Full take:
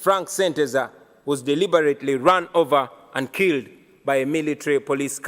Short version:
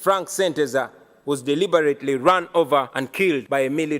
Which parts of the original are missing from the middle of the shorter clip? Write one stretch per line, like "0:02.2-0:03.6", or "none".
0:03.1-0:03.7

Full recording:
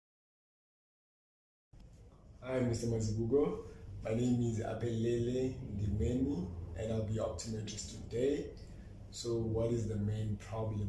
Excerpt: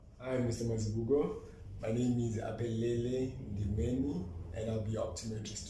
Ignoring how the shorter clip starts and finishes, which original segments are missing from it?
none

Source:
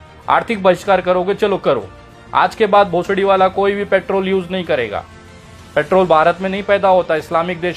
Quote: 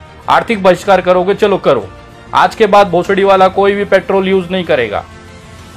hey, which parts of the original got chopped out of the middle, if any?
none

